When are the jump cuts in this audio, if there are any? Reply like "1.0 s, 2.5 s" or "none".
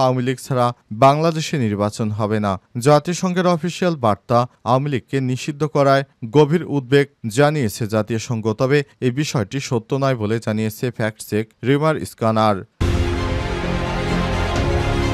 12.8 s

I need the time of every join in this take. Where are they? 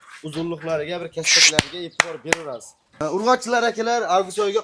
2.8 s

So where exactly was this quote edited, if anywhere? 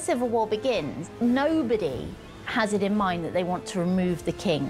1.0 s

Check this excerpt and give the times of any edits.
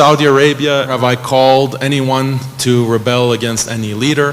0.9 s

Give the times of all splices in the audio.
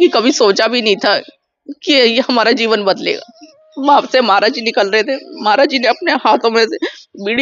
3.6 s

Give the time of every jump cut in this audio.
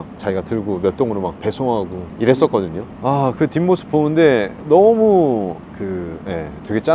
none

